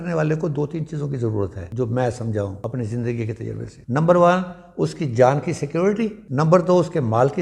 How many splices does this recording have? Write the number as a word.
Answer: four